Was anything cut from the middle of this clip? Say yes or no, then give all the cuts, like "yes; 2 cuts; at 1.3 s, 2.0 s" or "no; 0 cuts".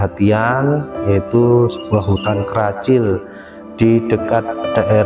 no; 0 cuts